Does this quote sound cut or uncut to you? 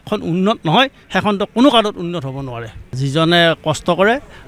cut